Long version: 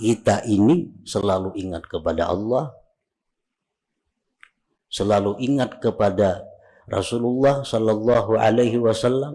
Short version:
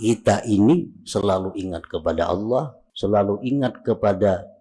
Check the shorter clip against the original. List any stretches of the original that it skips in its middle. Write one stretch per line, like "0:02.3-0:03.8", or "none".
0:02.8-0:04.8